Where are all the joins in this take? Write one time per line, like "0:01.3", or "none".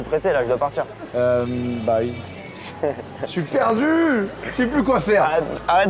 0:01.0
0:04.4